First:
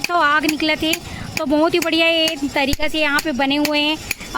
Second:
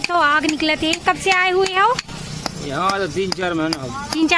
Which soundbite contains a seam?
second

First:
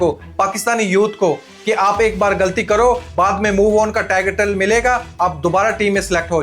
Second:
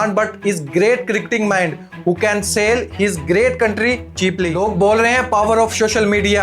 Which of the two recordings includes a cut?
second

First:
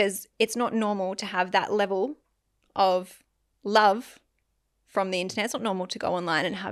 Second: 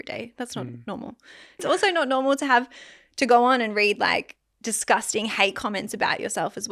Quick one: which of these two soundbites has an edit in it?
second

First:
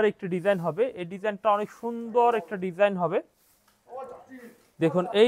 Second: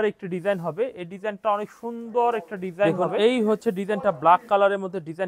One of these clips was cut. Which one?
second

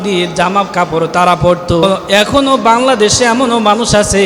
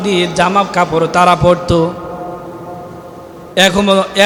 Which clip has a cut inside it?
first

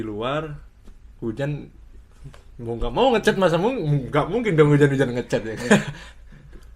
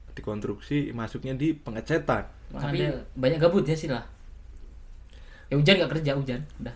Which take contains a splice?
second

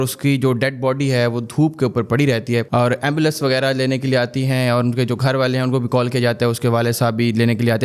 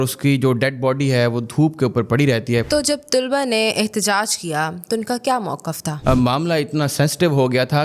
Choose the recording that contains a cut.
second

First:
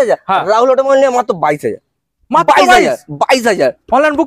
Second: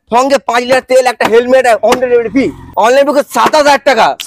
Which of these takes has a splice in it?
second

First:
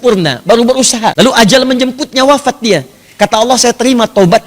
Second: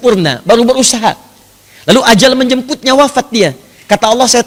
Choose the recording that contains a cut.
first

